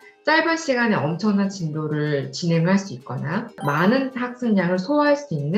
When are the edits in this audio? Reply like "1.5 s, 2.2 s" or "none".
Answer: 3.6 s